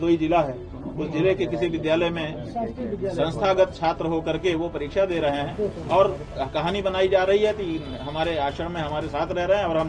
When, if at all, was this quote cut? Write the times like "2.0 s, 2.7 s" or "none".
none